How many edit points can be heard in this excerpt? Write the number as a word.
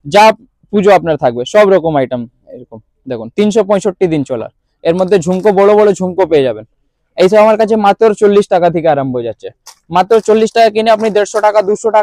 zero